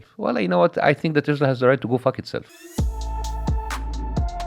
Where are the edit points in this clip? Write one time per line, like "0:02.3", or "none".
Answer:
0:02.5

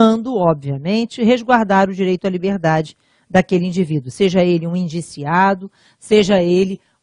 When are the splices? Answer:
0:01.5

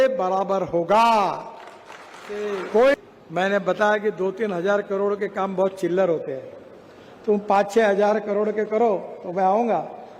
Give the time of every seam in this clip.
0:03.2

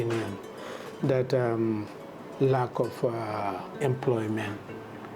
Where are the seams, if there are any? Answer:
0:03.7

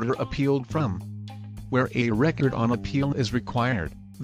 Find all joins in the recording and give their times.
0:03.3

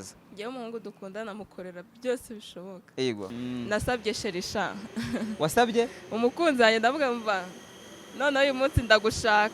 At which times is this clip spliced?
0:03.3

